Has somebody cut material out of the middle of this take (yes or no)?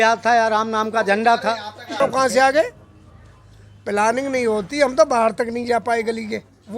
yes